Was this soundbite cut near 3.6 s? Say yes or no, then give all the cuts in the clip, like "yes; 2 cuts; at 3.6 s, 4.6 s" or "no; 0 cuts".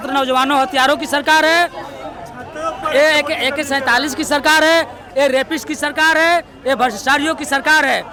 no; 0 cuts